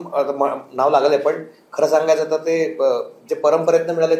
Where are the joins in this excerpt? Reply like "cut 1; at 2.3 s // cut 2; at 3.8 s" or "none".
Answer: none